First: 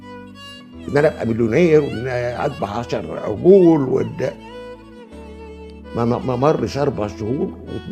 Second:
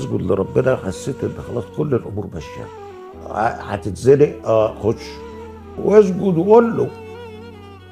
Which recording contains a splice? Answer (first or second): second